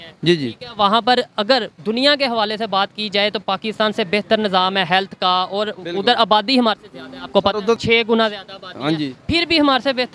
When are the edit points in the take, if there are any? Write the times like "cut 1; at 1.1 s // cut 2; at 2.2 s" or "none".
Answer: cut 1; at 7.8 s

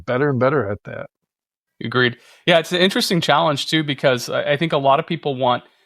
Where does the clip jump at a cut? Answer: none

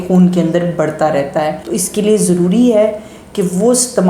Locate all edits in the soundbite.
none

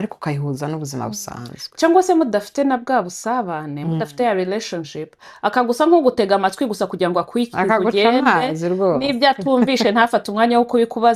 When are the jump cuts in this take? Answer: none

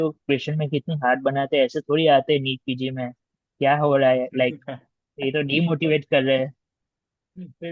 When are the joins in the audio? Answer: none

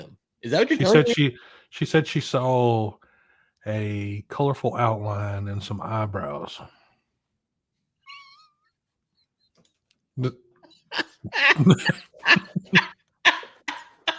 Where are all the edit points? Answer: none

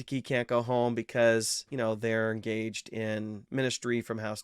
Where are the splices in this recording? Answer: cut 1; at 3.4 s

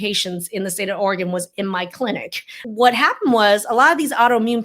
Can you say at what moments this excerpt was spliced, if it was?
cut 1; at 2.6 s

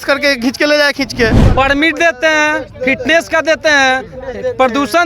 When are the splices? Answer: cut 1; at 1.4 s

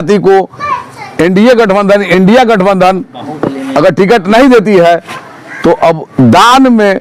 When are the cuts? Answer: none

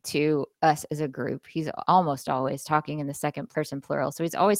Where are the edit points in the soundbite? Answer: cut 1; at 1.8 s // cut 2; at 3.4 s

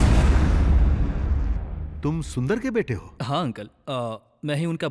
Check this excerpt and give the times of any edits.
none

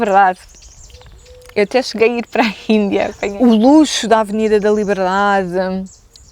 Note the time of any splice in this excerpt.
cut 1; at 3.2 s

